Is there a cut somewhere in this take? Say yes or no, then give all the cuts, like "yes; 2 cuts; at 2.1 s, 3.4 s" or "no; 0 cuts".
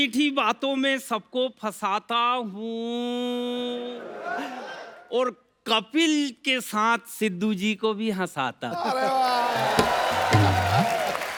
no; 0 cuts